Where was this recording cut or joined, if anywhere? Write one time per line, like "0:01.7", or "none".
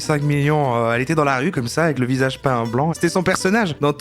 0:02.9